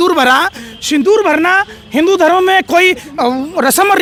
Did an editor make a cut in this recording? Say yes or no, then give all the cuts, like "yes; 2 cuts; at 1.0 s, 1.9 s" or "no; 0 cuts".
no; 0 cuts